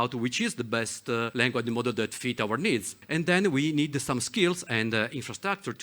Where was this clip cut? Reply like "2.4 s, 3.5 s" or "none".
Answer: 1.3 s, 3.0 s